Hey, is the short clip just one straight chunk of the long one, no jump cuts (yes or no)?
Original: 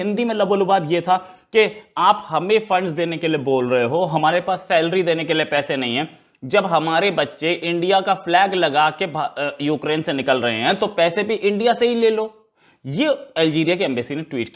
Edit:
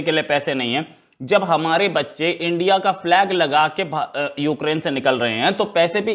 yes